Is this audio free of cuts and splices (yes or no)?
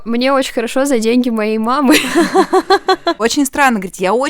no